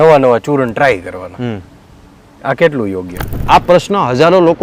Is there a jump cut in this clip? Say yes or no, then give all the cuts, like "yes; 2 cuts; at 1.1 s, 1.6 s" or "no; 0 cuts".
yes; 1 cut; at 3.4 s